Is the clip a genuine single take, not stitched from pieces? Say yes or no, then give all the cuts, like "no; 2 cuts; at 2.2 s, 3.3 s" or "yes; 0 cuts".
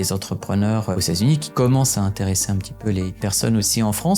no; 2 cuts; at 1.4 s, 3.2 s